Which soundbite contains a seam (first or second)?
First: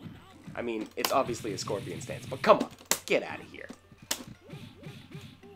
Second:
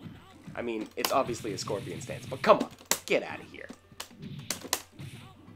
first